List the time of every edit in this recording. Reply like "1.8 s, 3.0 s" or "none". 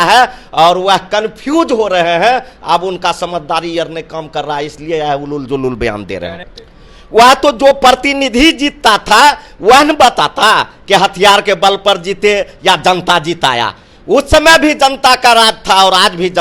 6.5 s